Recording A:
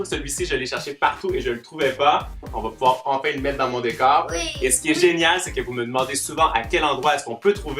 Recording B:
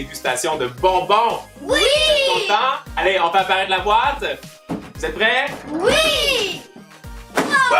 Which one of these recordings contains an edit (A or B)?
A